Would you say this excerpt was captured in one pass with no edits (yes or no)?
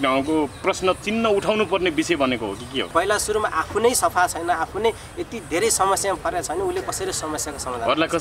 no